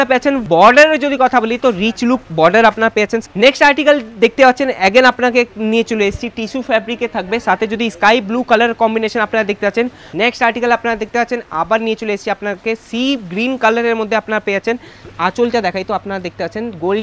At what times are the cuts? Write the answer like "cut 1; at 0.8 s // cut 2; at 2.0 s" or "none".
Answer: cut 1; at 3.3 s // cut 2; at 10.0 s // cut 3; at 15.0 s